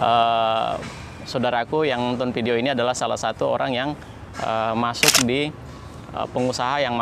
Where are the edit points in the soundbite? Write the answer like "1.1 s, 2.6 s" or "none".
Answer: none